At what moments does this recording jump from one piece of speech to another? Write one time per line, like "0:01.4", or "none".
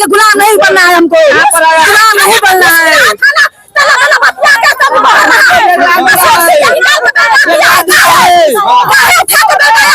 none